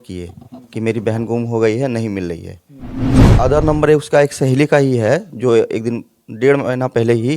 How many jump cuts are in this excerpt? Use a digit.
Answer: 1